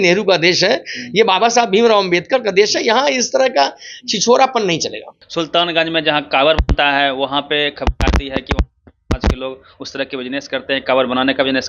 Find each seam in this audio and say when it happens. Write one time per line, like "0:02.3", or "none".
none